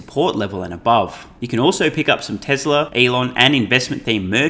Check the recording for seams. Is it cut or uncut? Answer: cut